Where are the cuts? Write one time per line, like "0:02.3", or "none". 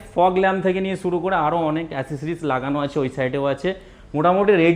none